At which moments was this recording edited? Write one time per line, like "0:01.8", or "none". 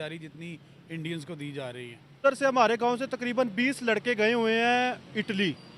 0:02.2